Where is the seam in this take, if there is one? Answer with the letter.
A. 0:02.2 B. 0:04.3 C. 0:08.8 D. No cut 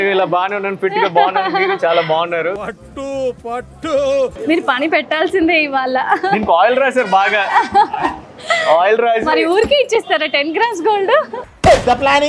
B